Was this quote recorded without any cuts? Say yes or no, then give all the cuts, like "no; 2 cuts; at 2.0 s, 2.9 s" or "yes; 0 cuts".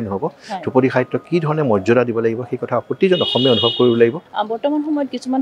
no; 1 cut; at 4.2 s